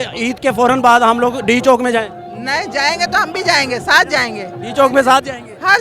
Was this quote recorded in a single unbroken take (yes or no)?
yes